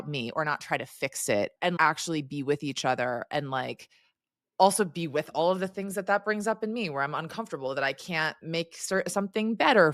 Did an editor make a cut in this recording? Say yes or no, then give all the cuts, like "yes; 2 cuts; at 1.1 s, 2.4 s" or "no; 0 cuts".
yes; 1 cut; at 1.6 s